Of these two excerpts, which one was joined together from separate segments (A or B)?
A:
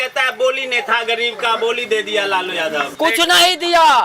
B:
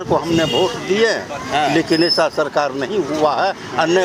A